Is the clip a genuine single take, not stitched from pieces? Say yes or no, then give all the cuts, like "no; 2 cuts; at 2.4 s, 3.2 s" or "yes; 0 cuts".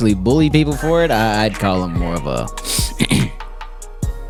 yes; 0 cuts